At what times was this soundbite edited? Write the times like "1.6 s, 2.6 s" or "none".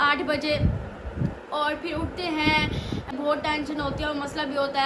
3.1 s